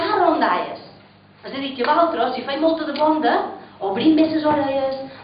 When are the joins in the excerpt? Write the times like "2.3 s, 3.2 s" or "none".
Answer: 1.7 s